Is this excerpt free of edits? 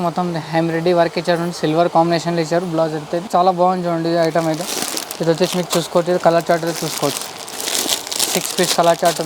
yes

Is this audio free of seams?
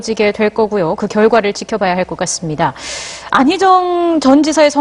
no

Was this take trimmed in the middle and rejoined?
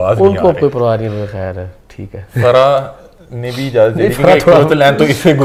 no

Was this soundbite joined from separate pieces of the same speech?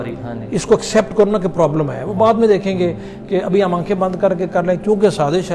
no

